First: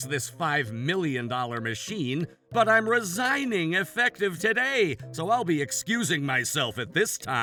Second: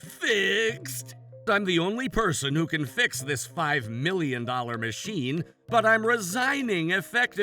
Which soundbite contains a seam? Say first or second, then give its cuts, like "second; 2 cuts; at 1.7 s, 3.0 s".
second; 1 cut; at 1.4 s